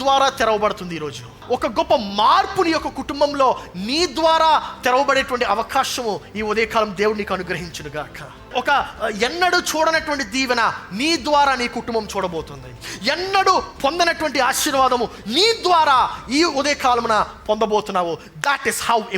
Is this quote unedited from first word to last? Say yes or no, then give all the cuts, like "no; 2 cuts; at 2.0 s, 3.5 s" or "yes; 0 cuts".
no; 2 cuts; at 1.4 s, 8.5 s